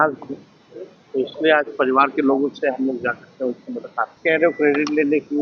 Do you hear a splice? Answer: yes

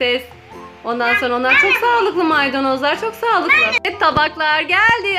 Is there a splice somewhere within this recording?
yes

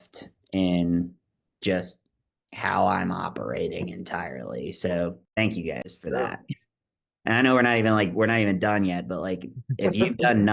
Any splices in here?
no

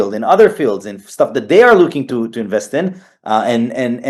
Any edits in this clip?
no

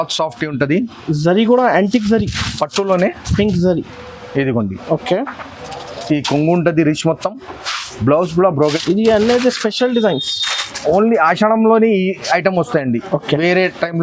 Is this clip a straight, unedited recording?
no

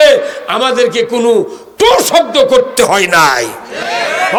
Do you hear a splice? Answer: no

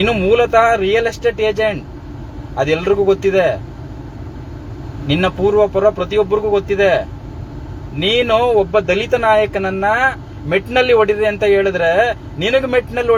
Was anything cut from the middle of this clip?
no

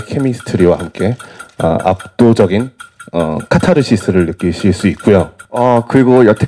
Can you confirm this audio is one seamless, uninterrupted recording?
no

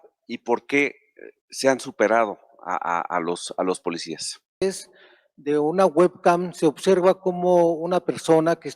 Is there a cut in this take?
yes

